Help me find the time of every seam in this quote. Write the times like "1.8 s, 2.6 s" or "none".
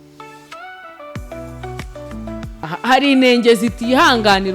2.7 s